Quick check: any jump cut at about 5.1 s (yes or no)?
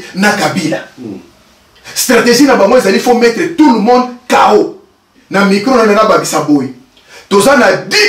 yes